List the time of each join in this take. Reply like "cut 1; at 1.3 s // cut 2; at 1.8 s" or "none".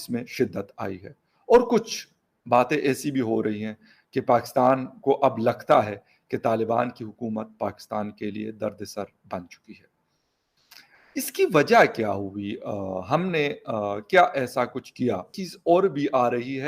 cut 1; at 15.3 s